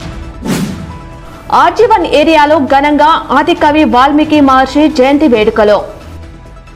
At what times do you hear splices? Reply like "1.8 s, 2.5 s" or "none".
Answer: none